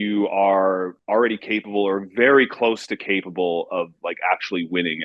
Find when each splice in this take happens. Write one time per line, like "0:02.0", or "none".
0:01.0

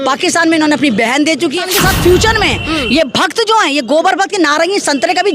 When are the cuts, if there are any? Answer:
0:01.7

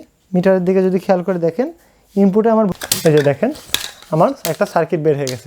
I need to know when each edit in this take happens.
0:02.7

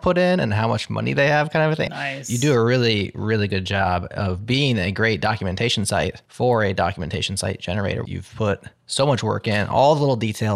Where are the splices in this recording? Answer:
0:01.9
0:06.2
0:08.1

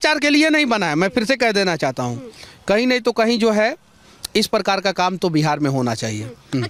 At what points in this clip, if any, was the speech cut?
none

